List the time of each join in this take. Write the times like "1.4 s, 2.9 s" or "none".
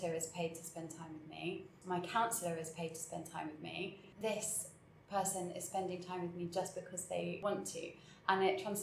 1.7 s, 4.0 s, 7.4 s